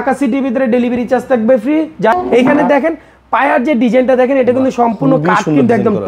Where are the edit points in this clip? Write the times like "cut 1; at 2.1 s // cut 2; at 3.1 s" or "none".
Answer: cut 1; at 2.1 s